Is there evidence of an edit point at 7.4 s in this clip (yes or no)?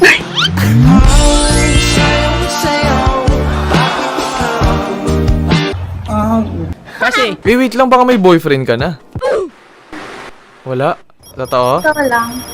yes